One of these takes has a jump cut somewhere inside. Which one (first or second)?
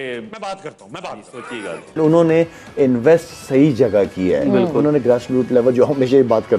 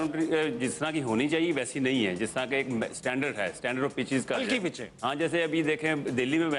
first